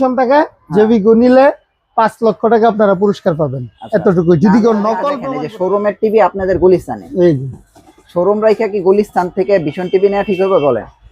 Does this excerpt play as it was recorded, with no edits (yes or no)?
no